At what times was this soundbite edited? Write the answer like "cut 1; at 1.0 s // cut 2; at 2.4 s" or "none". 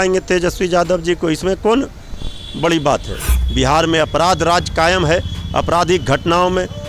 cut 1; at 3.4 s